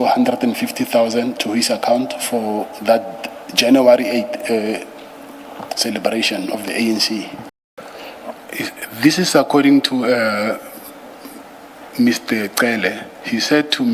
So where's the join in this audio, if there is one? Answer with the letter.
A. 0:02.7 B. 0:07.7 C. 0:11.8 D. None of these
B